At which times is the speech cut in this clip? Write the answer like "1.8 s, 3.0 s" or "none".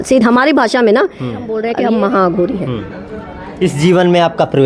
1.8 s